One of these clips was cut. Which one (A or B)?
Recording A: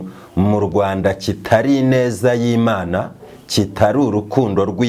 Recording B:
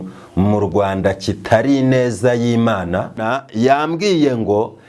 B